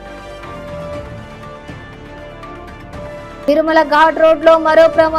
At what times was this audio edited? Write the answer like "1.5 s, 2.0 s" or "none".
none